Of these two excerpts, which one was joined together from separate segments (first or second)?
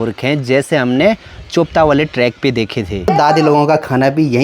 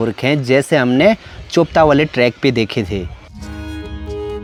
first